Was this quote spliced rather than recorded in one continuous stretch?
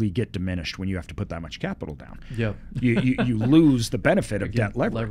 no; 0 cuts

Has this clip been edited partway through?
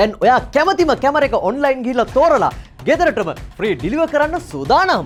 no; 0 cuts

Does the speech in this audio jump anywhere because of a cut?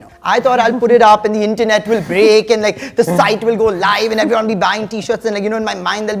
no; 0 cuts

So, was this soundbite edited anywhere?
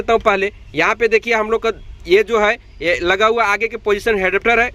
no; 0 cuts

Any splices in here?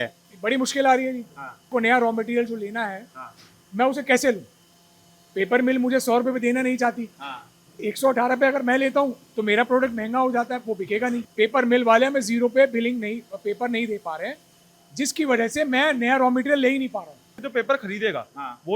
yes; 3 cuts; at 1.7 s, 11.3 s, 17.4 s

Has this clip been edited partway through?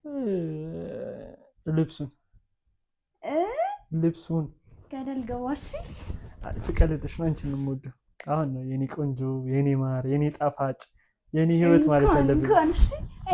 no; 0 cuts

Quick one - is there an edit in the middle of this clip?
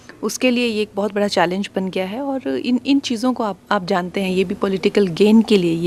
no; 0 cuts

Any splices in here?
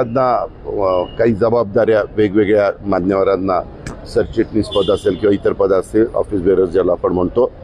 no; 0 cuts

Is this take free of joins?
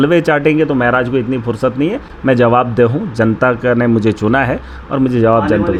yes; 0 cuts

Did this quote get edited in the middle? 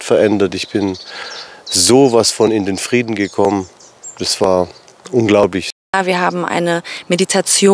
yes; 1 cut; at 5.9 s

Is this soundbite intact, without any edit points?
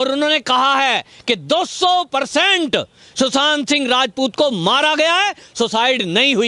yes; 0 cuts

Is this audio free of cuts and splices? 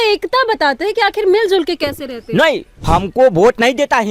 no; 1 cut; at 2.7 s

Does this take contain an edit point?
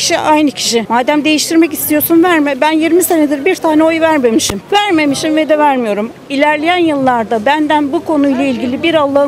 no; 0 cuts

